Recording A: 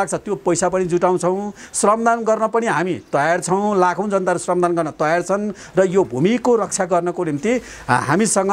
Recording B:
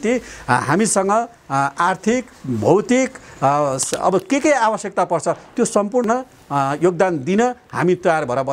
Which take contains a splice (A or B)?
B